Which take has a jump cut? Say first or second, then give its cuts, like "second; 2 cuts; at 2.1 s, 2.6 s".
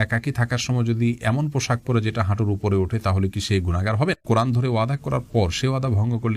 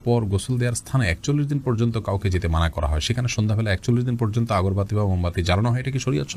first; 1 cut; at 4.2 s